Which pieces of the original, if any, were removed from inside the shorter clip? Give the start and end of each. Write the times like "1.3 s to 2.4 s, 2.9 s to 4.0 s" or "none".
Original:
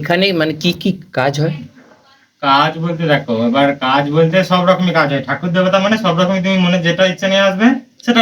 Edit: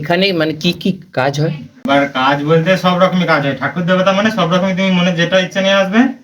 1.9 s to 3.5 s